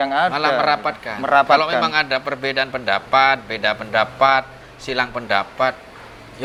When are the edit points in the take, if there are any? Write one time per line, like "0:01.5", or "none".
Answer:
none